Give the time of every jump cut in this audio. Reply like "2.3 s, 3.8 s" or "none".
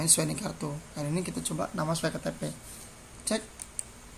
none